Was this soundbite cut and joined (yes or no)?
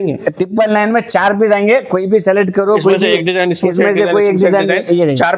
no